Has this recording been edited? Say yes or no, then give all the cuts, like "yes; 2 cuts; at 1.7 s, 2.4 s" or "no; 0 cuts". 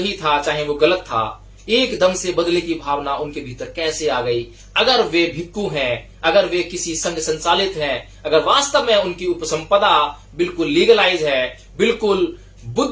no; 0 cuts